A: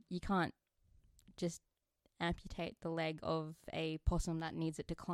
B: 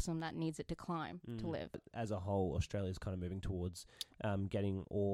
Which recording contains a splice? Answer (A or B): B